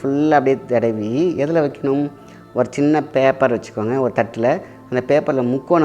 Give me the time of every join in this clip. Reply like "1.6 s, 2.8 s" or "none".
none